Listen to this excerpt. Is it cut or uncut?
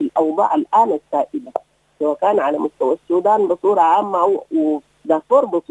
uncut